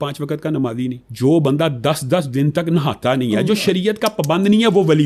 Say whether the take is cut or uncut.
cut